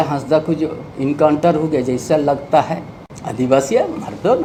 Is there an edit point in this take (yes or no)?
no